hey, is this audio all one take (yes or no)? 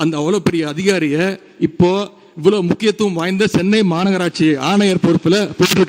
yes